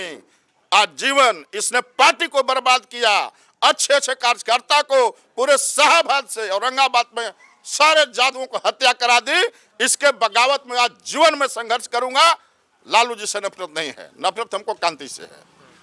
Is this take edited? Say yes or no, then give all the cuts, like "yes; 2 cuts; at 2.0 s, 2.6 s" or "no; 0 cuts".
no; 0 cuts